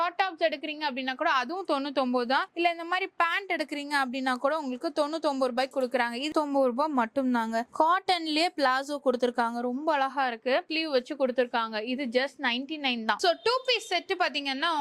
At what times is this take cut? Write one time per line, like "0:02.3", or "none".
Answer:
0:06.3
0:10.7
0:13.2